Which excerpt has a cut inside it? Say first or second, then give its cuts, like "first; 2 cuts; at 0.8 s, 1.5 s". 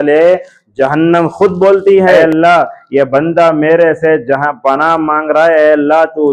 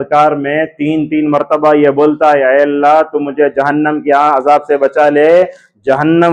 first; 1 cut; at 2.2 s